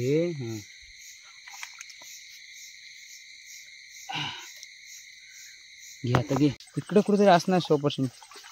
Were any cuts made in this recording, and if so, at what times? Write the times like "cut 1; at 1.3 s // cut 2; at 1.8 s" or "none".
cut 1; at 6.7 s